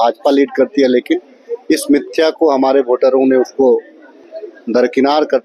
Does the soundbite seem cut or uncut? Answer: uncut